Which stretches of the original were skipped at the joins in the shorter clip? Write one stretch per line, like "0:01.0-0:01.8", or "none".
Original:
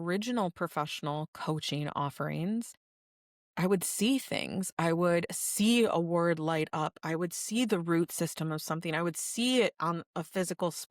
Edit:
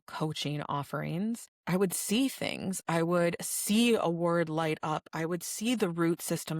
0:02.8-0:03.4